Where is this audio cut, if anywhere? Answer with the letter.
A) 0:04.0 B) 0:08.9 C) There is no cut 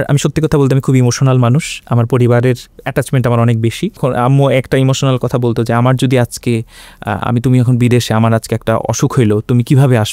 A